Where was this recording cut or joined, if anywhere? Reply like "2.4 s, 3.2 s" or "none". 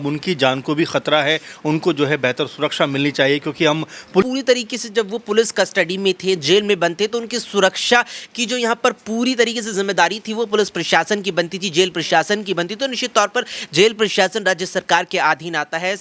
4.2 s